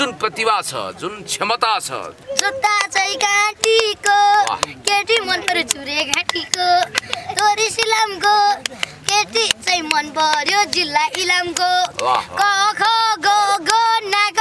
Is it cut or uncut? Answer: cut